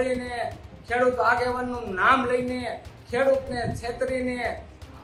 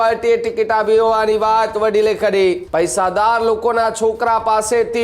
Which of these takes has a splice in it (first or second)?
second